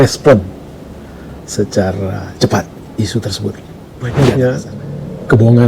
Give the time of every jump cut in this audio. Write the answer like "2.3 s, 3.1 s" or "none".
4.1 s

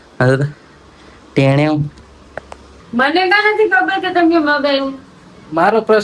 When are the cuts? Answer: 2.7 s

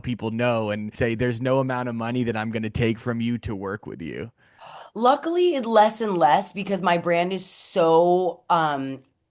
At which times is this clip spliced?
0.9 s

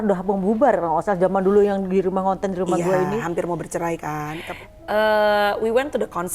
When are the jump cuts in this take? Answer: 4.5 s

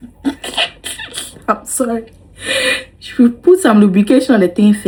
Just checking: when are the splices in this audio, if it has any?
none

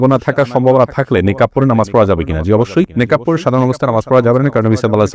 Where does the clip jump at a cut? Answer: none

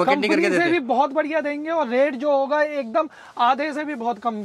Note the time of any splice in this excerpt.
none

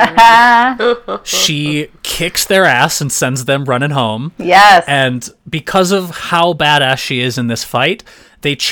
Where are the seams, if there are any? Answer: none

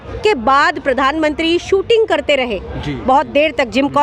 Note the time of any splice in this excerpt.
none

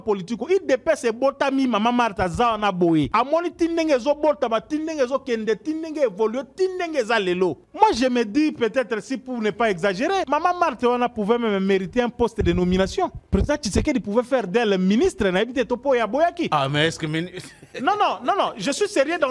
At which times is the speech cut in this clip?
3.1 s, 7.6 s, 10.3 s

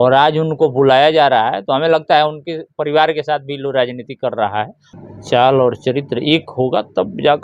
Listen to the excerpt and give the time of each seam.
4.9 s

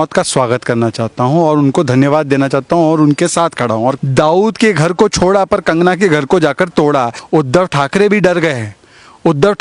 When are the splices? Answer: 4.0 s, 7.2 s

